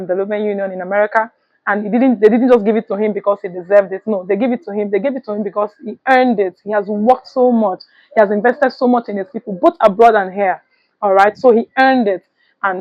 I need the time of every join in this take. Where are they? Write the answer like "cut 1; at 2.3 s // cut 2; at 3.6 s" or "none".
none